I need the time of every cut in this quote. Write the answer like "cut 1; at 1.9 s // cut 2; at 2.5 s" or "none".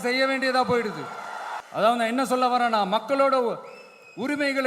cut 1; at 1.5 s